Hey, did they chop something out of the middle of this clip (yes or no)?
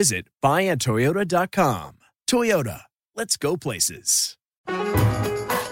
yes